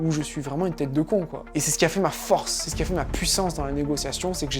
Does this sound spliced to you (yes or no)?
yes